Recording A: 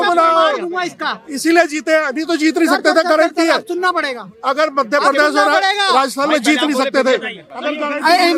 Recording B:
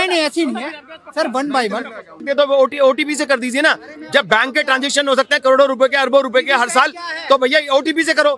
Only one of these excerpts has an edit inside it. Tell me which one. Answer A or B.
B